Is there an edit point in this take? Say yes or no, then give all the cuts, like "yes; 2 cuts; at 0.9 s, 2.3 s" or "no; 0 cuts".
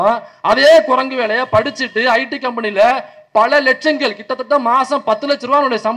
no; 0 cuts